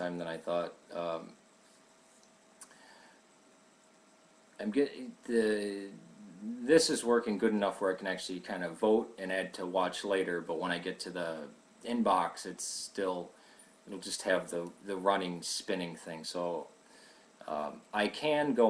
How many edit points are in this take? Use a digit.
1